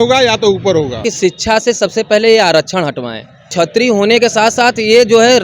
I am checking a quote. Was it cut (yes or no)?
yes